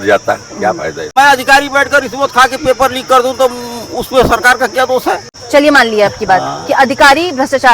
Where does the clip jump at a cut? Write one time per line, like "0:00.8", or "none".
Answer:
0:01.1
0:05.3